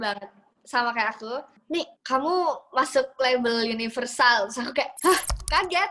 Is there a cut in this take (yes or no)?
yes